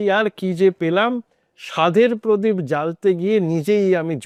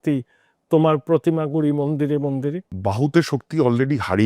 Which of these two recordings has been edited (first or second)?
second